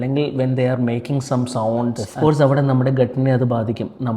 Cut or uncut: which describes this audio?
cut